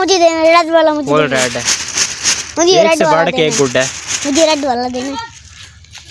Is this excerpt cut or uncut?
uncut